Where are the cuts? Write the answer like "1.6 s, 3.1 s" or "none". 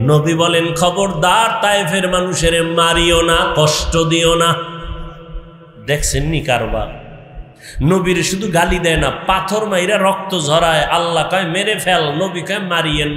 none

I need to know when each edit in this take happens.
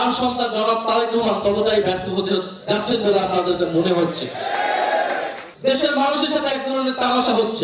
5.4 s

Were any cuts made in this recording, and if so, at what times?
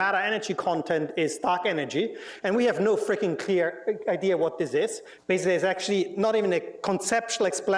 1.0 s

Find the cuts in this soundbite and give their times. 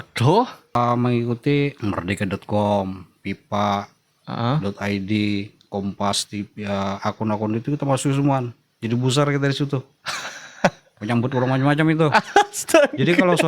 0.7 s, 1.8 s

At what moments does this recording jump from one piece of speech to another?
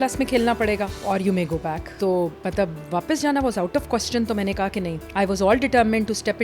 1.0 s, 1.9 s, 5.0 s

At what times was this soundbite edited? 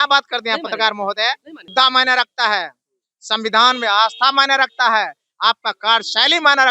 1.7 s

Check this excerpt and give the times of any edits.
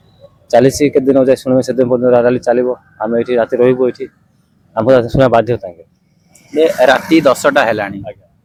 none

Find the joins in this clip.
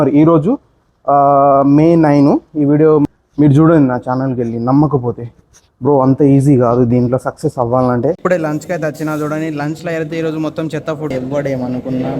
3.0 s, 8.2 s, 11.1 s

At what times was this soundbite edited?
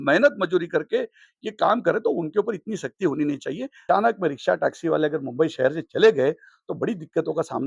3.8 s

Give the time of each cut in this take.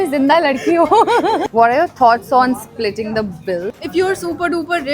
1.5 s, 3.8 s

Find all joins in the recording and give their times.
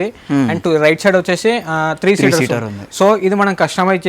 none

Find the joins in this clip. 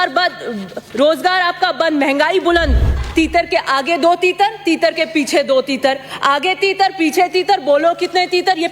3.0 s

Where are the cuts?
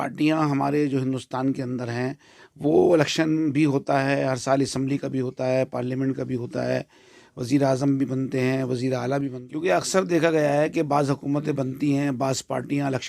9.3 s

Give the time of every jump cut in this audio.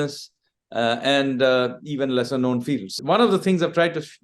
2.9 s

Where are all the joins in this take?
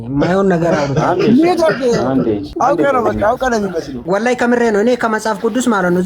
2.5 s, 3.9 s

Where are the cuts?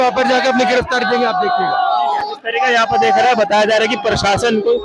none

